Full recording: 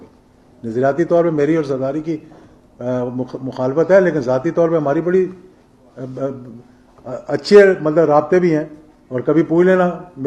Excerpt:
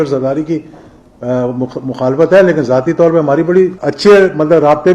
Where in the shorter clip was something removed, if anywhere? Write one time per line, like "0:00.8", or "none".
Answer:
0:03.8